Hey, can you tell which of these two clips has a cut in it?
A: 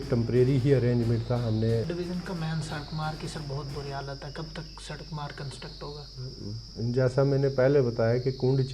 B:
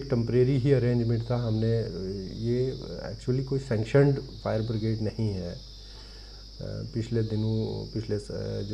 A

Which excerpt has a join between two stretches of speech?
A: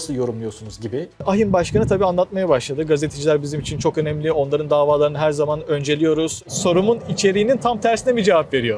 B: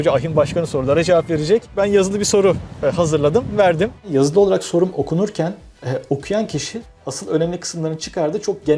A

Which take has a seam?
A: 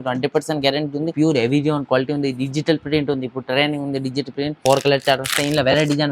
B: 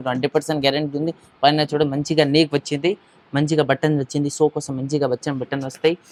A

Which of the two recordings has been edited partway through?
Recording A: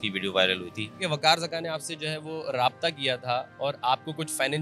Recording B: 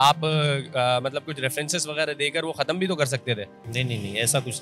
A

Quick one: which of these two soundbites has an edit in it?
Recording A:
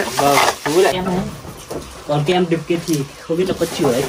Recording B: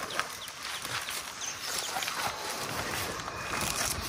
A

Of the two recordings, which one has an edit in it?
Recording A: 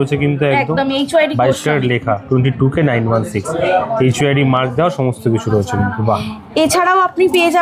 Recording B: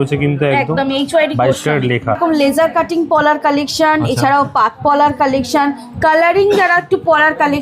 B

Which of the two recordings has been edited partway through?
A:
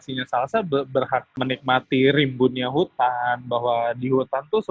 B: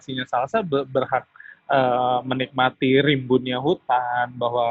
A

